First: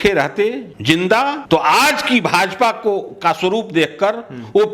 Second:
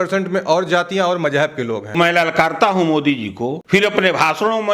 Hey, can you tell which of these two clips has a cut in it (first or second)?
second